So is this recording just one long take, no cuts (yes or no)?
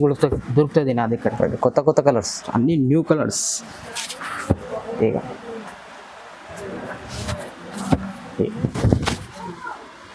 no